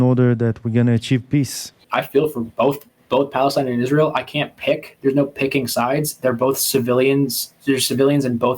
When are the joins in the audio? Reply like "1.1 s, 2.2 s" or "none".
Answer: 1.8 s, 2.9 s